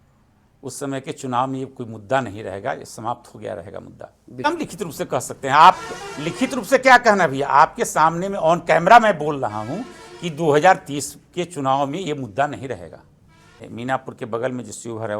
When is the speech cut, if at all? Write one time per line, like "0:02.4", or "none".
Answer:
0:04.5
0:13.7